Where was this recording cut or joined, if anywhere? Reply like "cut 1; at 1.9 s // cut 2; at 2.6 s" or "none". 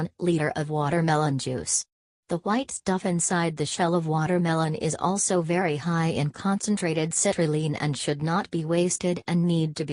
cut 1; at 6.7 s